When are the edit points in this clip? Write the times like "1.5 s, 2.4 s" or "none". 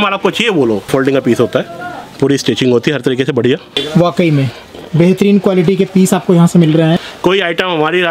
0.9 s, 3.7 s, 7.0 s